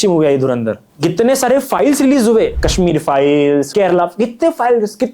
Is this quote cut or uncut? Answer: cut